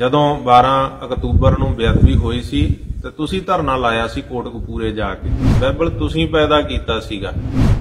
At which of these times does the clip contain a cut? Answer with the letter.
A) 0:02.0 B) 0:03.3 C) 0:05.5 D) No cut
C